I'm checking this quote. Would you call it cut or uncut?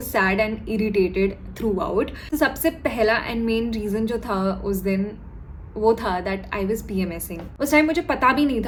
uncut